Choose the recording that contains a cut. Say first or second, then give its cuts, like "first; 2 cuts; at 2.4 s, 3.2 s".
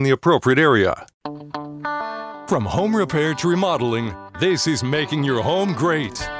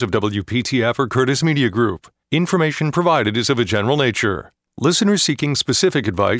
first; 1 cut; at 1.1 s